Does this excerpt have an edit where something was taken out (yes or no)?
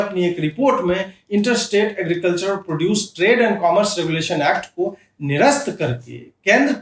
no